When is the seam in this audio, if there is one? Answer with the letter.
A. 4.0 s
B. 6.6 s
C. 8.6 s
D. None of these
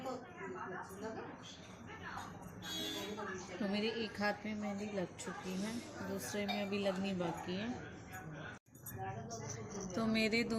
C